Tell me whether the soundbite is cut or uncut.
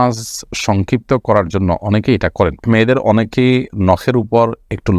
cut